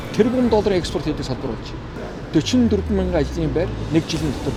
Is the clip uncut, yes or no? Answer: yes